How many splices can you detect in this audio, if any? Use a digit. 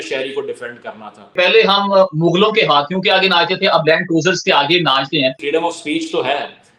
2